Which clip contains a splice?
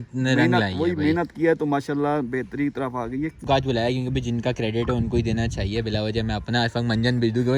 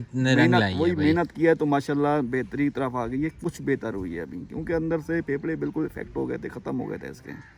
first; 1 cut; at 3.4 s

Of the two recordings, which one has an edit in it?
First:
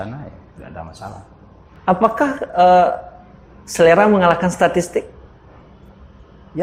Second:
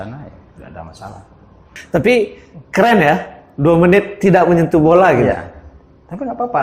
second; 1 cut; at 1.7 s

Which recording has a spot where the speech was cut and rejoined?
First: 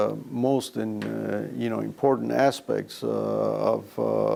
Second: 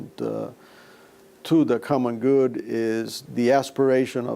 second; 1 cut; at 3.2 s

